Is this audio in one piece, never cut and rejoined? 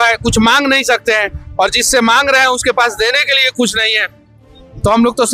yes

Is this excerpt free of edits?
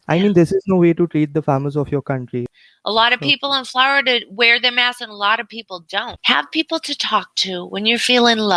no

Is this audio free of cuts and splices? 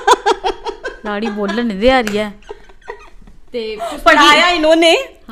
yes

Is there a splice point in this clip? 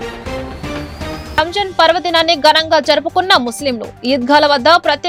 no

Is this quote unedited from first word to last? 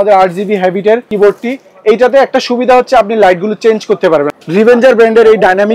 no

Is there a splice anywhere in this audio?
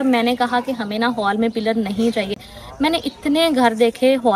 no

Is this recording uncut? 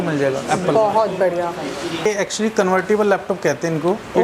no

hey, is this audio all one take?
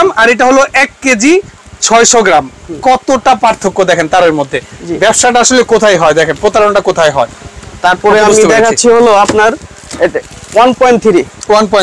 yes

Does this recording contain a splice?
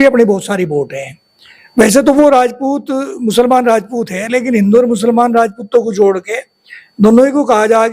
no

